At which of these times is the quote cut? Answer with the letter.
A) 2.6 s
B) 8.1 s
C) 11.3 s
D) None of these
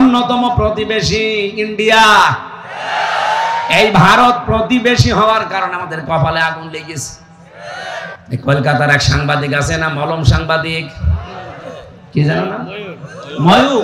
B